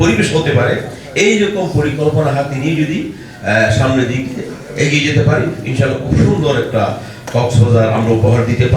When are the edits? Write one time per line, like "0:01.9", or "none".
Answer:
none